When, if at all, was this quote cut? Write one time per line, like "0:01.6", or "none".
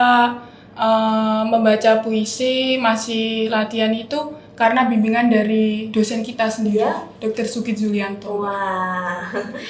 none

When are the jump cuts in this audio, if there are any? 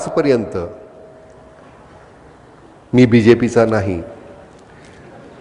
none

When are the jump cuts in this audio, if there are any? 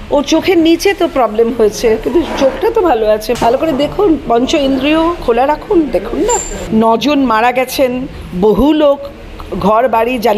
0:03.3
0:06.5

